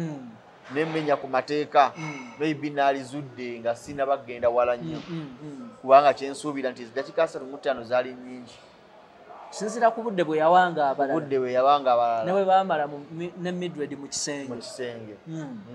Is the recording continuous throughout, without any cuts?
yes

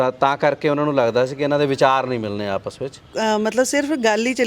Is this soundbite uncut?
no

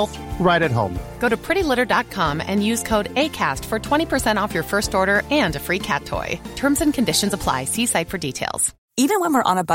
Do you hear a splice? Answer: no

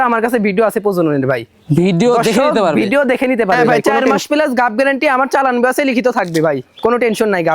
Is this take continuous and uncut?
no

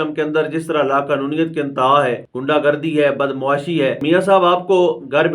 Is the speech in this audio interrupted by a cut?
yes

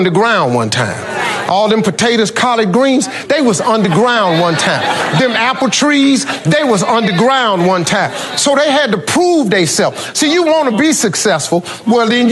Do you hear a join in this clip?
no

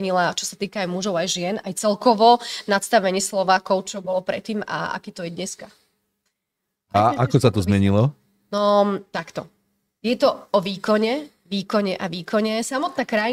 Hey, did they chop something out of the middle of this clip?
no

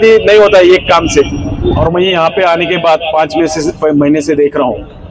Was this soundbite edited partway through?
yes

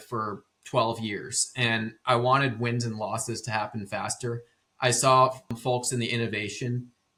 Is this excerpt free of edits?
yes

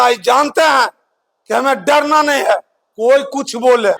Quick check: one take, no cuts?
yes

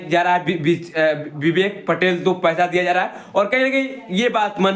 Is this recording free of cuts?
yes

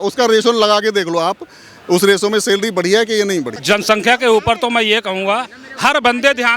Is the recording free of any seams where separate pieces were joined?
no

